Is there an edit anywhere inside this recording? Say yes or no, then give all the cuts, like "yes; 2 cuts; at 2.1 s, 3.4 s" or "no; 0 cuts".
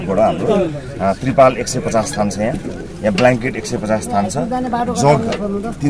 no; 0 cuts